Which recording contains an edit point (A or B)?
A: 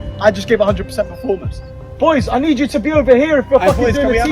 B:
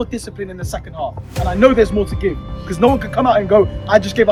A